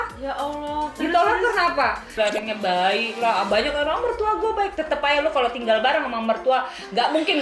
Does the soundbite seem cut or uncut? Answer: cut